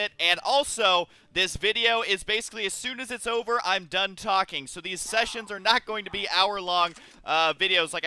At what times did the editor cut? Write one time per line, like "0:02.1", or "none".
0:01.7

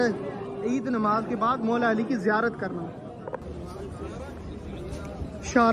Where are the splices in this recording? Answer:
0:03.4

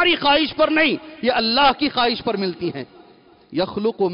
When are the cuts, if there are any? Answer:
none

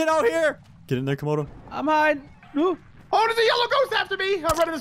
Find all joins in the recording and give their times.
0:01.3
0:02.9

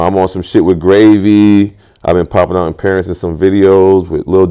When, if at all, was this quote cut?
none

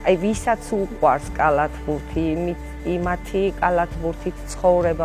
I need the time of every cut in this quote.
none

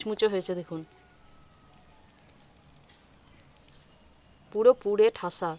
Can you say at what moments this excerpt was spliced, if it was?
none

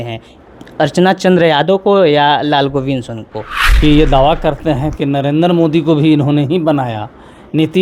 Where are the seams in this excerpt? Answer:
0:03.8

